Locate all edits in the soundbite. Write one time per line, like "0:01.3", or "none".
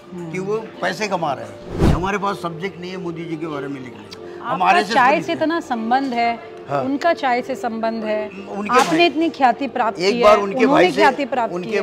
0:01.9